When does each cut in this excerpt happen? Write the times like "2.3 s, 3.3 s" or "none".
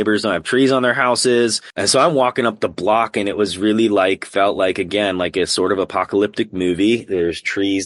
1.7 s